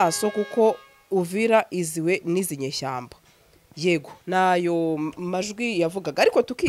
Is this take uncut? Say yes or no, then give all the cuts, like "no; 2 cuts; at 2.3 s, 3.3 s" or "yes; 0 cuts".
yes; 0 cuts